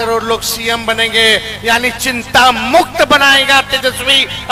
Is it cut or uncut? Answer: uncut